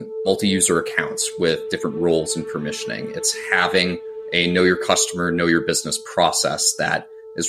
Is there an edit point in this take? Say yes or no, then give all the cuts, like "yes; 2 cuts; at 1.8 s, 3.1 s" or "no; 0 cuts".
no; 0 cuts